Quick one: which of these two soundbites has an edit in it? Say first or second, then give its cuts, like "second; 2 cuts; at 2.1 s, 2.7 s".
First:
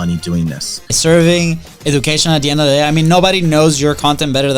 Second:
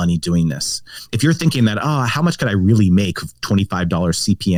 first; 1 cut; at 0.9 s